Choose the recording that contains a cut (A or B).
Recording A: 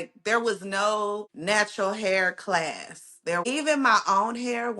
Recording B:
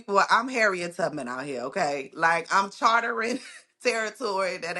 A